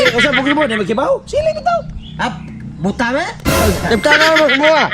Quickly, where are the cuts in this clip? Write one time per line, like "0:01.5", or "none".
none

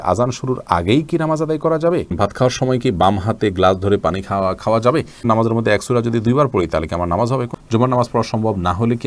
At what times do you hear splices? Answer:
0:02.1
0:05.2
0:07.5

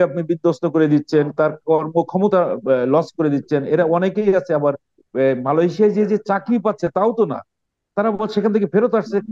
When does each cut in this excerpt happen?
none

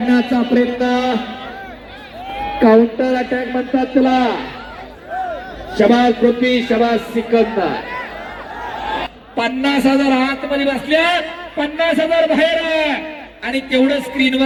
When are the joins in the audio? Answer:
none

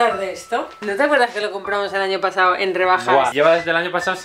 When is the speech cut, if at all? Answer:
0:00.8
0:03.3

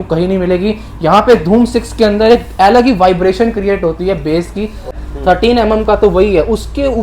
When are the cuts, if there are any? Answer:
0:04.9

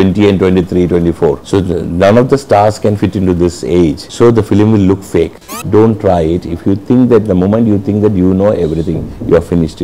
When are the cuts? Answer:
0:01.4
0:04.0
0:05.5

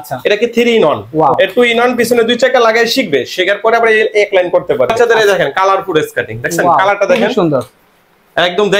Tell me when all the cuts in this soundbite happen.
0:01.0
0:04.9

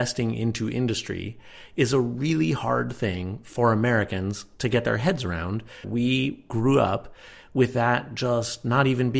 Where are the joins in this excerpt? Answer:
0:05.8

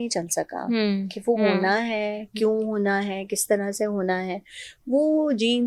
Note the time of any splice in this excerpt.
none

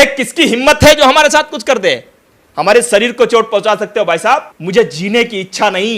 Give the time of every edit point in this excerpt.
0:04.5

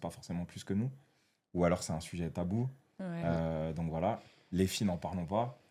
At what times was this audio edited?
none

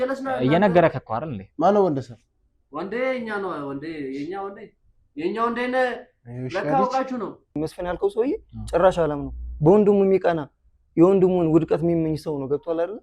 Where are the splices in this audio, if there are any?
0:07.6

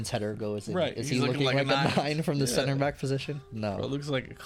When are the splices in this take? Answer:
none

